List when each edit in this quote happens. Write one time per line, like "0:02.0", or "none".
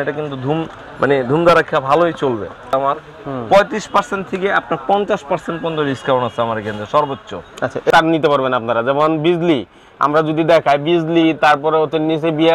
0:02.7
0:07.9